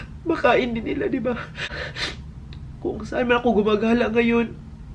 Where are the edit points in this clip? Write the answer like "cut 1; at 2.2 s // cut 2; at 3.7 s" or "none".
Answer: cut 1; at 1.7 s

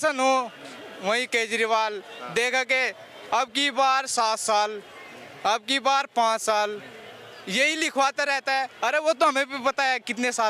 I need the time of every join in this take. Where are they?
none

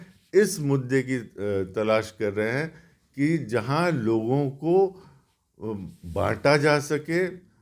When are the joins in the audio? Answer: none

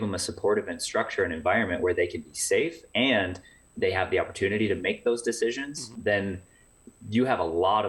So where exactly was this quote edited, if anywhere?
cut 1; at 5.9 s

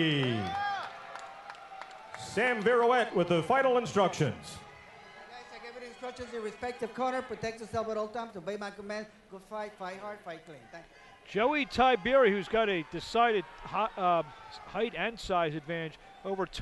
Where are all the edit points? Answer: cut 1; at 3.1 s

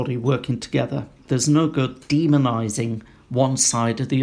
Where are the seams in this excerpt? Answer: cut 1; at 1.2 s

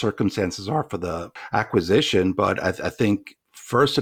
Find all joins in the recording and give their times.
cut 1; at 1.3 s

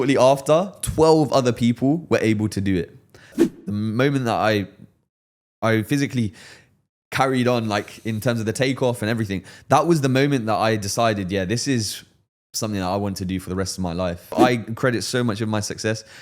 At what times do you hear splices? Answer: cut 1; at 3.4 s // cut 2; at 14.3 s

